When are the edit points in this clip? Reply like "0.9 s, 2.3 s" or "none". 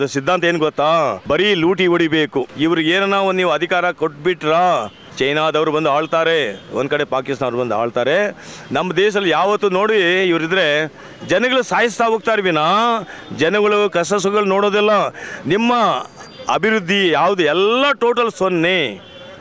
1.2 s, 2.5 s, 5.0 s, 15.3 s